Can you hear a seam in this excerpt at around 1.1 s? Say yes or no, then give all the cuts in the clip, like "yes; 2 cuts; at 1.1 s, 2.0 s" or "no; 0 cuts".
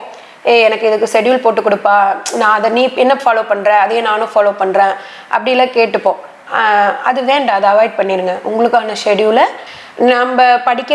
no; 1 cut; at 9.7 s